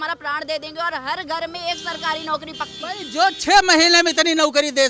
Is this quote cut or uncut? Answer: uncut